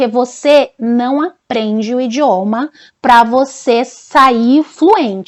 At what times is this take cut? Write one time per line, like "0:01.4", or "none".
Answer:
none